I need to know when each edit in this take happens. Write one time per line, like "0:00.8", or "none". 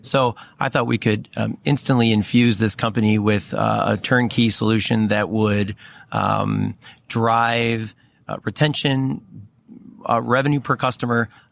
none